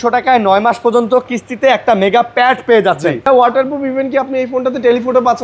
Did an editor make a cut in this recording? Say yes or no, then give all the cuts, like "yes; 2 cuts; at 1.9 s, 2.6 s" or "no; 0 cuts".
yes; 1 cut; at 3.2 s